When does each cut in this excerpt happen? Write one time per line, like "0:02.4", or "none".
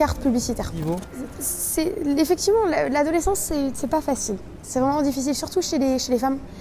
0:01.1